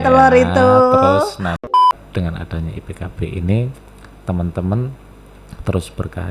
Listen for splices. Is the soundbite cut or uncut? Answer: cut